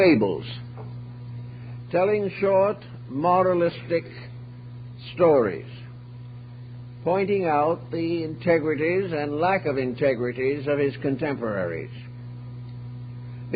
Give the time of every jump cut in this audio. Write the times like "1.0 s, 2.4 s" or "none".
8.5 s